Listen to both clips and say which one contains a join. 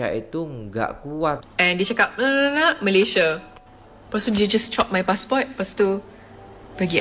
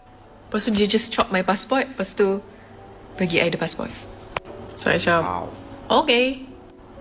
first; 1 cut; at 1.5 s

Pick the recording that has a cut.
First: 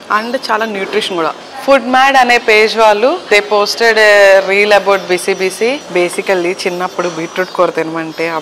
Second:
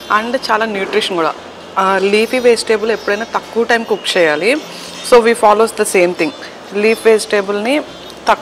first; 3 cuts; at 1.4 s, 3.3 s, 5.8 s

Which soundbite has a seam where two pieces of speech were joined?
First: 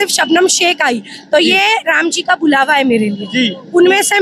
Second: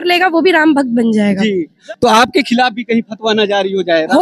second; 1 cut; at 1.8 s

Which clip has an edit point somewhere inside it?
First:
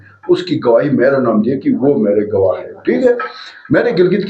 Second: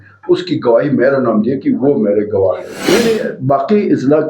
second; 1 cut; at 2.9 s

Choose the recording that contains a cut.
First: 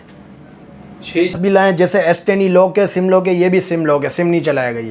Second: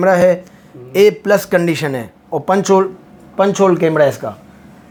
first; 1 cut; at 1.4 s

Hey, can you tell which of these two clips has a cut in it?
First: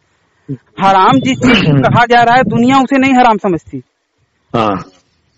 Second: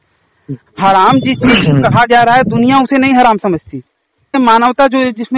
second; 1 cut; at 4.3 s

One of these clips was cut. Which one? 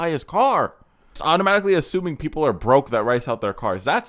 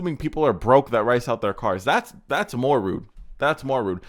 first; 1 cut; at 1.1 s

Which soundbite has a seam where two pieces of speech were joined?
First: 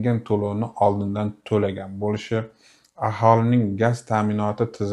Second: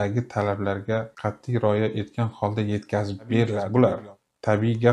second; 1 cut; at 3.6 s

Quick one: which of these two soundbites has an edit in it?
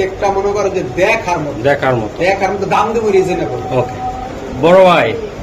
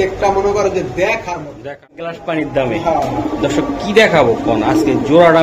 second; 1 cut; at 1.6 s

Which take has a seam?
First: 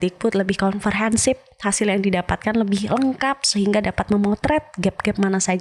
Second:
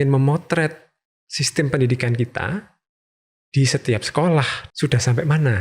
second; 1 cut; at 4.6 s

